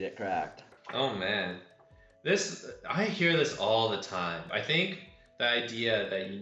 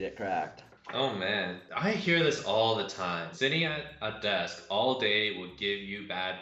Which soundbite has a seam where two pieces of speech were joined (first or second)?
second